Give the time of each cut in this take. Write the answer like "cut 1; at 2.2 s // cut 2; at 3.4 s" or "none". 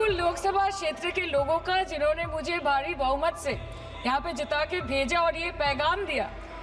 none

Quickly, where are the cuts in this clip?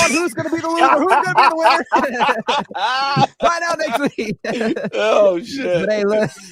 none

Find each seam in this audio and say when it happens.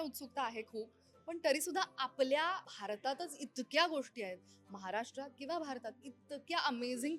cut 1; at 2.7 s

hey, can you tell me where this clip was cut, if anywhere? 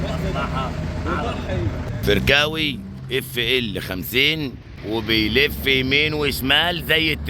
cut 1; at 2.0 s // cut 2; at 4.7 s

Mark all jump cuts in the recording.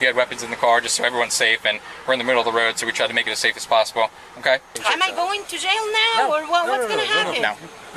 cut 1; at 4.7 s

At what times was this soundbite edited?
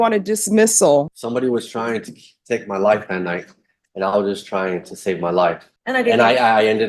cut 1; at 1.1 s // cut 2; at 5.7 s

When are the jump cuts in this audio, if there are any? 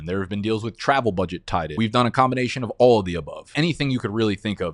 cut 1; at 1.7 s // cut 2; at 3.5 s

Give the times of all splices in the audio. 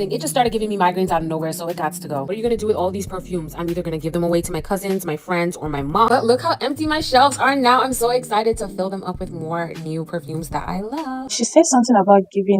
cut 1; at 2.3 s // cut 2; at 6.1 s // cut 3; at 11.3 s

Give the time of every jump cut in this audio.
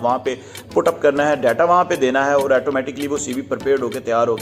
none

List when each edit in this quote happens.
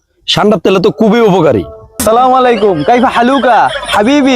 cut 1; at 1.8 s

